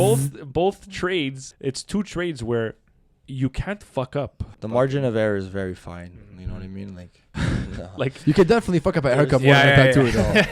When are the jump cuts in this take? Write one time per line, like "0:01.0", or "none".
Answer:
0:01.5
0:04.4
0:07.2